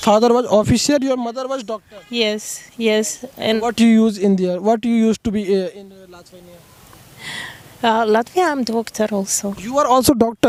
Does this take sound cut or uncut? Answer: uncut